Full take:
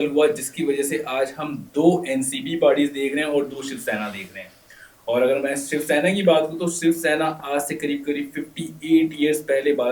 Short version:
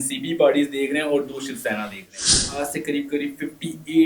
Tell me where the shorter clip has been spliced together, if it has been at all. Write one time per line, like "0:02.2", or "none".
0:02.5